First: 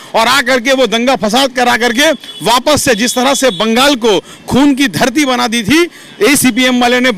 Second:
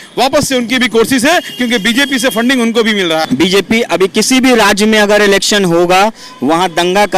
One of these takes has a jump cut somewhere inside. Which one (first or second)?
second